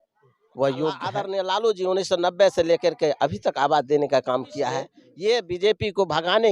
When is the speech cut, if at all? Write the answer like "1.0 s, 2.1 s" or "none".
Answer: 1.1 s, 5.0 s

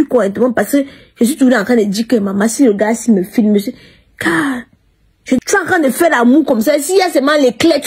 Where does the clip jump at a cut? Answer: 5.4 s

